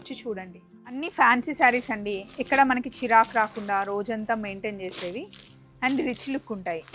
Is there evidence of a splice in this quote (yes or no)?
yes